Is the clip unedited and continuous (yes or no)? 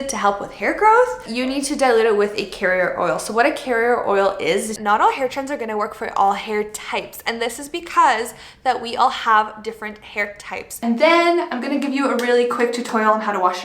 no